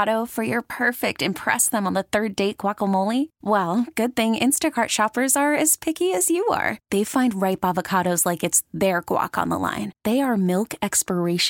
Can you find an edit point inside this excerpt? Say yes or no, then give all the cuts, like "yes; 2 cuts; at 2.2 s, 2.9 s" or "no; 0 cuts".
no; 0 cuts